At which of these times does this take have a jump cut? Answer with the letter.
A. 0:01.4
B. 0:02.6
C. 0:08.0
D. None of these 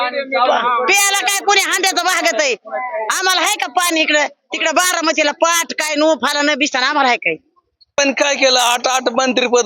C